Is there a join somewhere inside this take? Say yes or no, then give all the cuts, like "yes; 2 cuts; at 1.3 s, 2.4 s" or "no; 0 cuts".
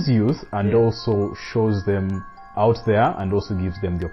yes; 1 cut; at 2.5 s